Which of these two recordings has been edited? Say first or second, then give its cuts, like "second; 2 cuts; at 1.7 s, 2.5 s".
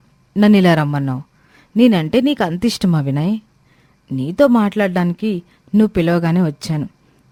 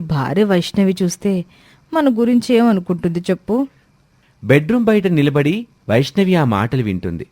second; 1 cut; at 3.9 s